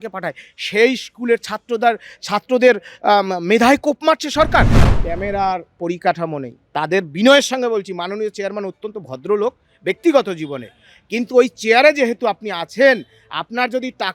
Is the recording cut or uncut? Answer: cut